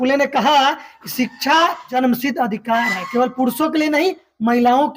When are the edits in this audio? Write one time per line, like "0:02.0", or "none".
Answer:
0:01.8